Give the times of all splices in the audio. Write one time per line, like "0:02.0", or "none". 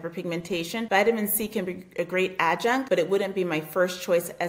0:00.9
0:02.8